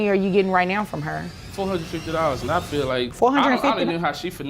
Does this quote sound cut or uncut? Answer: cut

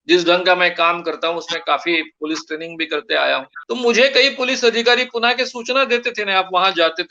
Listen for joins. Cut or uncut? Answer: cut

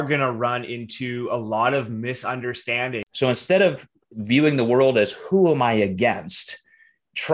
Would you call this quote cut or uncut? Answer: cut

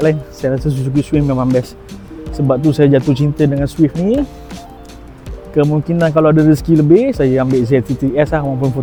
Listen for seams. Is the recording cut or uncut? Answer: uncut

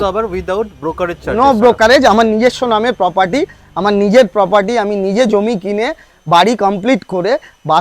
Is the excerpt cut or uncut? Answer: uncut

